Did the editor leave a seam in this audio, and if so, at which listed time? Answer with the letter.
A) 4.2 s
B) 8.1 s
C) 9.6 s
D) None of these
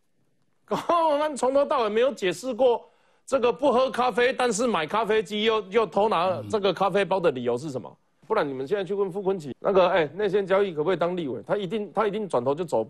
B